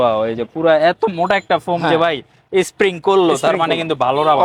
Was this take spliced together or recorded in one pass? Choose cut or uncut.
uncut